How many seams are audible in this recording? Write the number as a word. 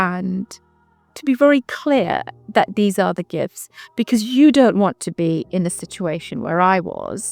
one